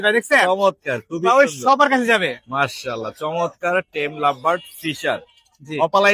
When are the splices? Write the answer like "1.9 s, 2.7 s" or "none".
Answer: none